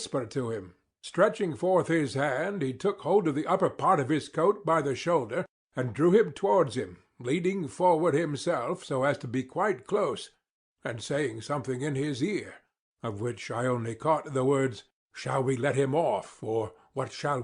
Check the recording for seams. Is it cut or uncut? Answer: cut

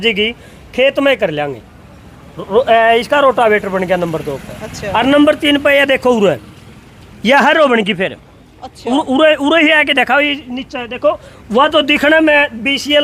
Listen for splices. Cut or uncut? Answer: uncut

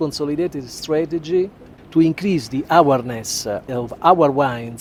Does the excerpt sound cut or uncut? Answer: uncut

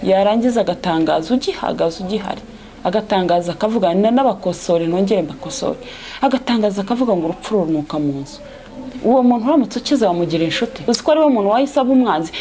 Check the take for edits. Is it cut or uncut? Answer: cut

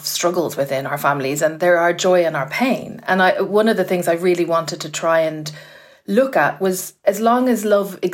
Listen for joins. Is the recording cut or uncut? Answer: cut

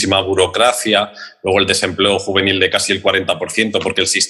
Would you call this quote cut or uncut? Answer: uncut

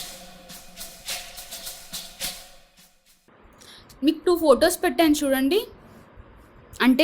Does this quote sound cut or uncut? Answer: cut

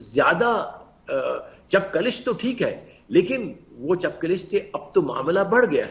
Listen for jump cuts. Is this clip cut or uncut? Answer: uncut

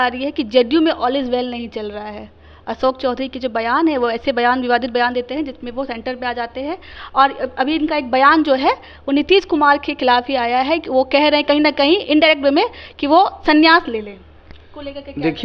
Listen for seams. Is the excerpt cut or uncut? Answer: uncut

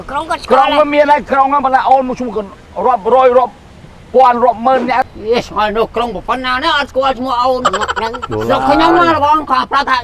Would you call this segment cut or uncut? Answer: cut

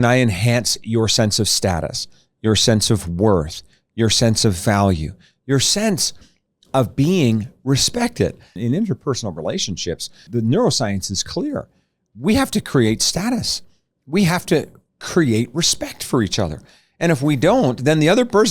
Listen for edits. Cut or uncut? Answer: cut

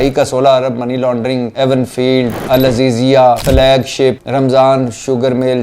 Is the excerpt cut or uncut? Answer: cut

